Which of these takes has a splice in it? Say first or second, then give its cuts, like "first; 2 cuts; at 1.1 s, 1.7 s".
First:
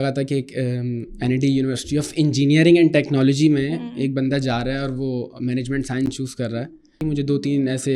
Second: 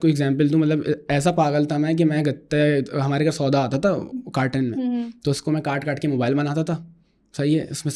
first; 1 cut; at 7.0 s